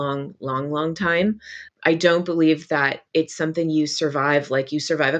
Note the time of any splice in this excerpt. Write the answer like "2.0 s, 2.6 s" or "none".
1.6 s